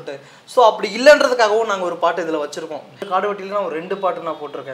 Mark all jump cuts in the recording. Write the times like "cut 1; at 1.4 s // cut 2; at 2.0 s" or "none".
cut 1; at 3.0 s